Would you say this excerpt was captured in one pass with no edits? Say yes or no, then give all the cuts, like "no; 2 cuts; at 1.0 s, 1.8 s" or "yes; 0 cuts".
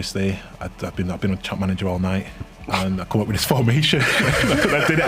yes; 0 cuts